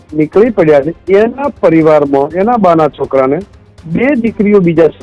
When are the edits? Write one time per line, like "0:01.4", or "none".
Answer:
none